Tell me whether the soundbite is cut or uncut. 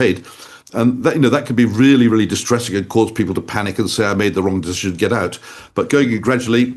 uncut